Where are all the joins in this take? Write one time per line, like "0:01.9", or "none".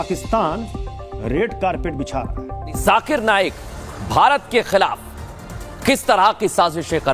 0:02.8